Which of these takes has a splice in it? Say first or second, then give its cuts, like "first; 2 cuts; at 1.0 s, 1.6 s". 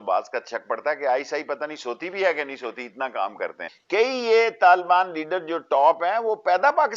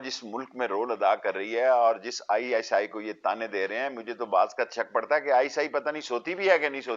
first; 1 cut; at 3.7 s